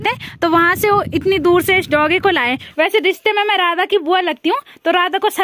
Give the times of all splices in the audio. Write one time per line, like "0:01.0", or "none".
0:02.6

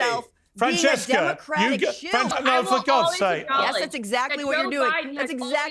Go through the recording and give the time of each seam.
0:02.3

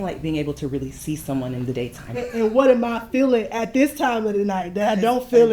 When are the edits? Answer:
0:02.2

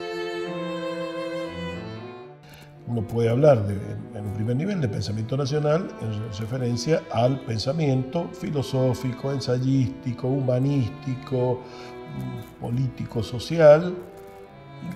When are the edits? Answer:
0:12.5

